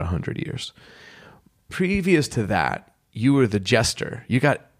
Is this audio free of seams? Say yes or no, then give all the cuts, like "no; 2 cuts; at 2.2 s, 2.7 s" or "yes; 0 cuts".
no; 1 cut; at 1.7 s